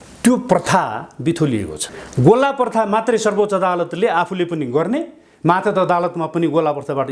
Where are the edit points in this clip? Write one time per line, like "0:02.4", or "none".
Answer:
0:01.9